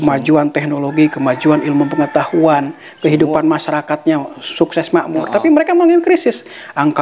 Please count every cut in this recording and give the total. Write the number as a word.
zero